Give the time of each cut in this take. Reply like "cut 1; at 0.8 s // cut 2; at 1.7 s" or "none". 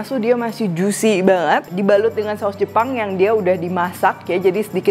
cut 1; at 1.7 s